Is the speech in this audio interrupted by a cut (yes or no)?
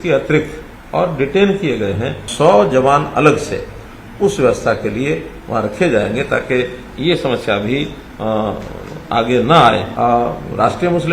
yes